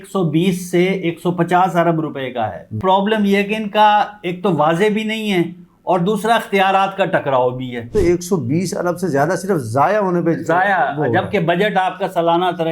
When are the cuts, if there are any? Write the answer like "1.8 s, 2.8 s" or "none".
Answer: 2.8 s, 7.9 s